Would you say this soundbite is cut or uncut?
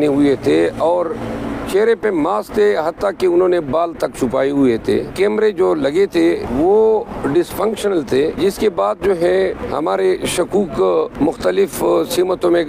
cut